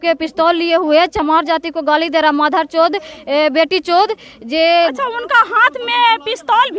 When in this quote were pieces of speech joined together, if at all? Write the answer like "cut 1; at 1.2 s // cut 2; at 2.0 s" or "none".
none